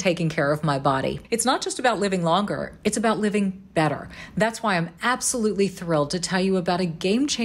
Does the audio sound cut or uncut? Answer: cut